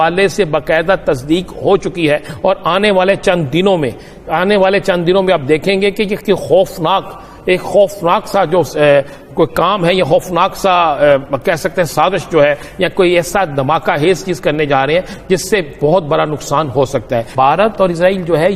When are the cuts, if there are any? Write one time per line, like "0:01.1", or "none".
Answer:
0:17.3